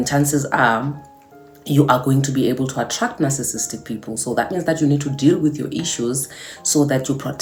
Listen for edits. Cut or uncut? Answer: uncut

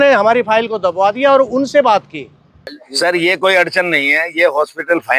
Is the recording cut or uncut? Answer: cut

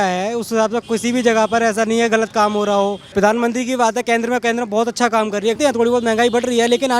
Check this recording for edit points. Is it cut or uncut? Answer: cut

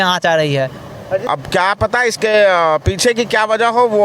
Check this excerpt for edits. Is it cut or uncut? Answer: cut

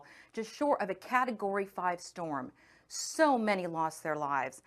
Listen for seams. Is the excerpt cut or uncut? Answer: uncut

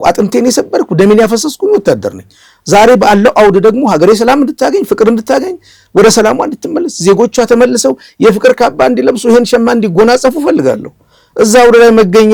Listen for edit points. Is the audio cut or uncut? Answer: uncut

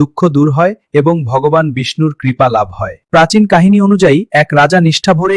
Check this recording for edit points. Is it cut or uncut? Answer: cut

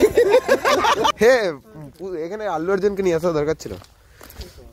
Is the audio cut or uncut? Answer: cut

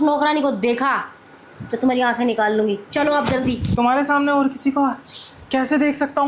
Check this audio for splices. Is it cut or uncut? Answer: uncut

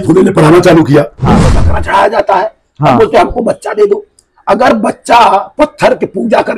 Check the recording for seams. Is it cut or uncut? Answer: cut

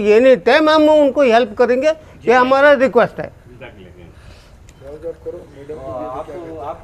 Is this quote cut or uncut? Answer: uncut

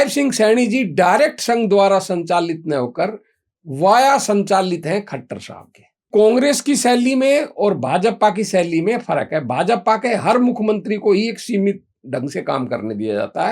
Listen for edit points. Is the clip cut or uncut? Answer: cut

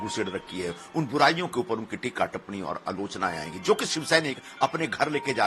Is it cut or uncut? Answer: uncut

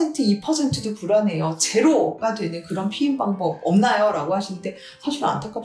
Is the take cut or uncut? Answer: uncut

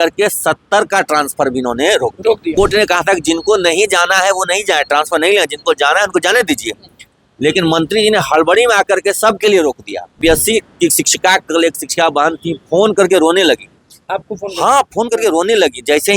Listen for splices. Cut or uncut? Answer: cut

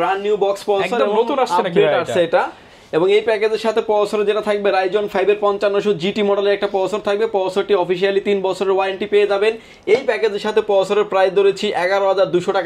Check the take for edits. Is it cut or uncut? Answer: uncut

